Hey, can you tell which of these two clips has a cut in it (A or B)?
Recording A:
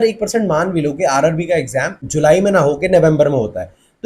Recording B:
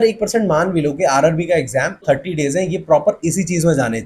B